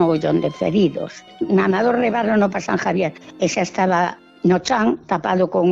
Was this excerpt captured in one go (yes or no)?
no